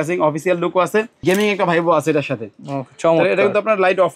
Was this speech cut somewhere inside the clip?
yes; 1 cut; at 1.1 s

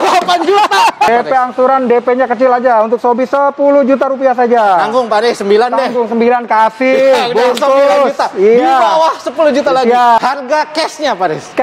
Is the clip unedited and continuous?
no; 2 cuts; at 1.1 s, 10.2 s

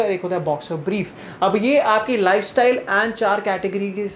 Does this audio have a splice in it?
no; 0 cuts

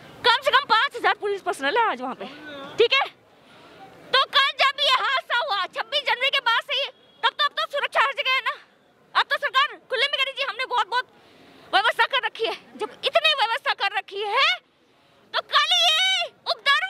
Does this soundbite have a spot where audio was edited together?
no; 0 cuts

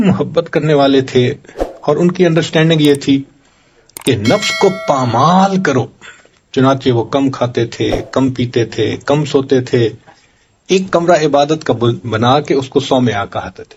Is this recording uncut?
yes; 0 cuts

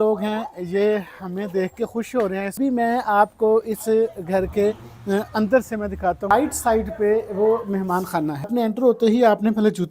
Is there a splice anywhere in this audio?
yes; 3 cuts; at 2.6 s, 6.3 s, 8.5 s

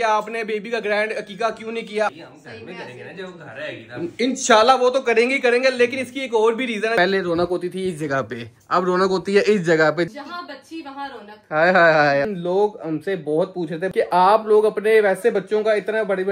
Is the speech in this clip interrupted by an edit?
yes; 5 cuts; at 2.1 s, 6.9 s, 10.1 s, 12.3 s, 13.9 s

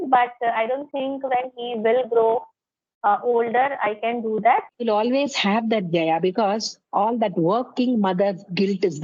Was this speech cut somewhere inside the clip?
yes; 1 cut; at 4.7 s

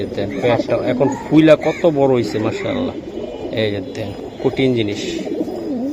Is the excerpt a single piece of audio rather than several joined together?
yes; 0 cuts

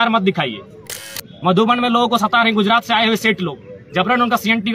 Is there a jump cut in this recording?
yes; 1 cut; at 1.1 s

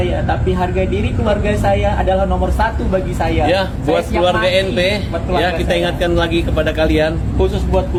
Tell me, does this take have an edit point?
no; 0 cuts

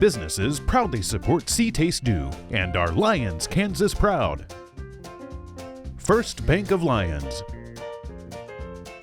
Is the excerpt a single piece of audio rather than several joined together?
no; 3 cuts; at 4.3 s, 6.1 s, 7.0 s

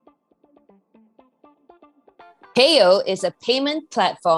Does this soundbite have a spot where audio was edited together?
no; 0 cuts

